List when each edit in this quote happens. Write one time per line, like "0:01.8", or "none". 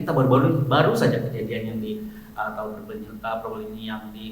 none